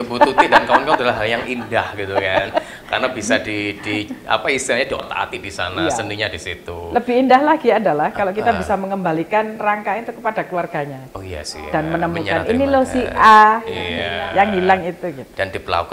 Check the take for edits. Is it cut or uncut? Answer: uncut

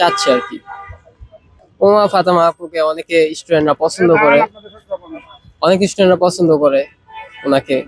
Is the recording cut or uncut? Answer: uncut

